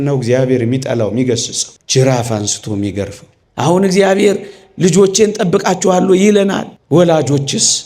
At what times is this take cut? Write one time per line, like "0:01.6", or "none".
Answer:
0:03.4